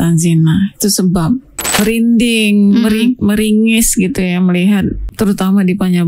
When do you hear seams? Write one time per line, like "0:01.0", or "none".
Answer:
0:01.8
0:05.0